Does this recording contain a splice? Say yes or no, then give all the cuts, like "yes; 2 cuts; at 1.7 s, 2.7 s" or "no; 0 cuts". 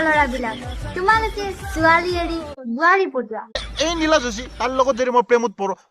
yes; 1 cut; at 3.6 s